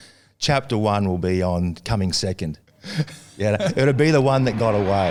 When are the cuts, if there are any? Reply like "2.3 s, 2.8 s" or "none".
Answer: none